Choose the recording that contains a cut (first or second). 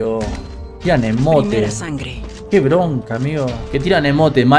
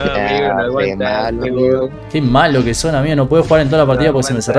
first